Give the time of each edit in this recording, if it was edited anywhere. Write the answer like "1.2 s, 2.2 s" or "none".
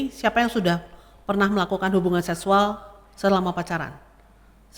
none